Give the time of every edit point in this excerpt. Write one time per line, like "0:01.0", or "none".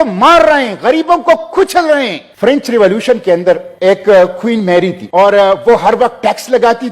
0:02.2
0:03.7
0:05.0